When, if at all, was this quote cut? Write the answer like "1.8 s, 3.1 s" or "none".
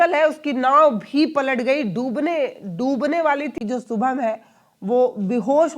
3.5 s